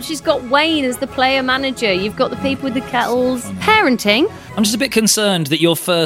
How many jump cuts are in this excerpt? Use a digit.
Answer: 1